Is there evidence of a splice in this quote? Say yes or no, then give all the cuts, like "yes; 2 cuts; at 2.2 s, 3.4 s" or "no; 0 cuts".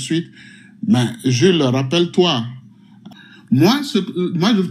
yes; 1 cut; at 3.0 s